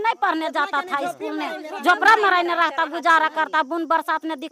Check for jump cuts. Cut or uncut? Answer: uncut